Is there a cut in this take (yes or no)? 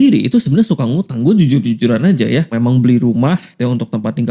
yes